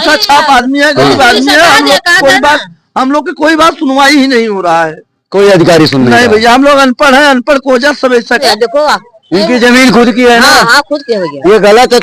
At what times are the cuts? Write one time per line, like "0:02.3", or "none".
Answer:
0:08.4